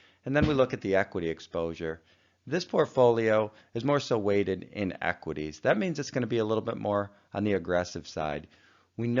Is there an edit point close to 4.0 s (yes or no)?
no